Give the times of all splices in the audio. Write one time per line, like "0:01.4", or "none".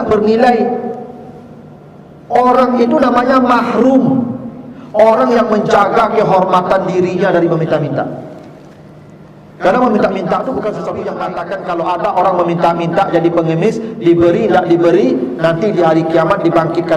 0:11.3